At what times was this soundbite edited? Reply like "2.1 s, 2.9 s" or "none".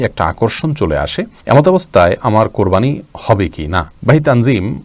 none